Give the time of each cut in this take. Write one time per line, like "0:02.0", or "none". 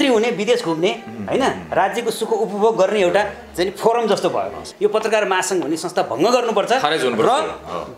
0:04.7